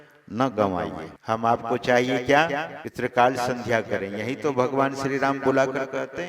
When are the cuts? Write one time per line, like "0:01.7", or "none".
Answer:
0:01.1
0:02.8